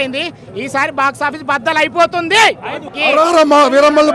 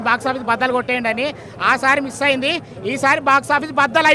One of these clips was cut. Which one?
first; 1 cut; at 2.8 s

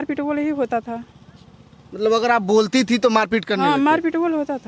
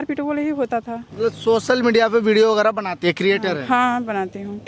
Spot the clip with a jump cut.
second; 1 cut; at 1.0 s

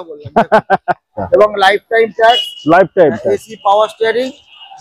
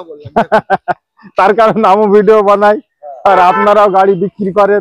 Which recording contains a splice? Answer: first; 1 cut; at 1.2 s

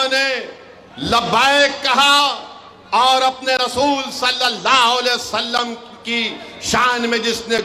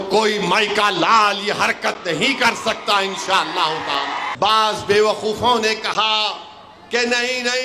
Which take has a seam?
second; 1 cut; at 4.3 s

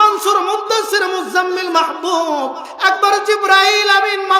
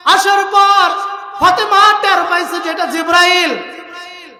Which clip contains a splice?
first; 1 cut; at 2.7 s

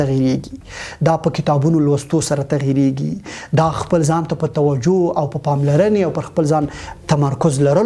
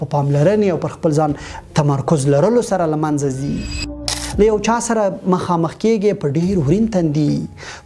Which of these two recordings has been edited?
second; 1 cut; at 3.9 s

